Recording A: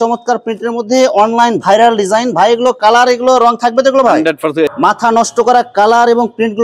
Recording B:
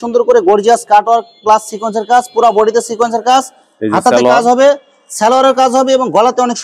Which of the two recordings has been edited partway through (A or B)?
A